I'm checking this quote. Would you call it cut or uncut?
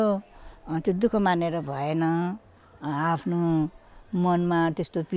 uncut